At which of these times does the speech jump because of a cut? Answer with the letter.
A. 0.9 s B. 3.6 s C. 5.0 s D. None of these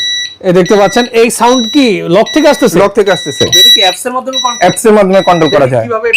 B